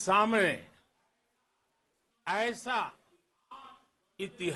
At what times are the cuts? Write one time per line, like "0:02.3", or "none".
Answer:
none